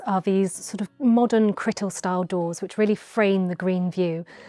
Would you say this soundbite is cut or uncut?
uncut